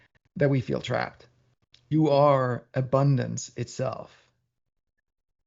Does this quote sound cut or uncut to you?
cut